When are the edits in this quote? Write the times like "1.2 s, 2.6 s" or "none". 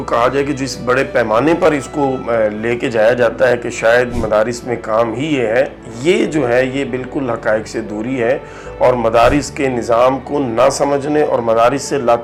none